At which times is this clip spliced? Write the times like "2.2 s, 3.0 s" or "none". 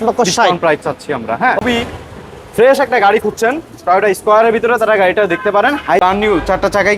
1.6 s, 6.0 s